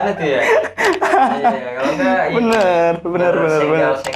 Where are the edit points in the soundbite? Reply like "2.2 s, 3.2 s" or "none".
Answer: none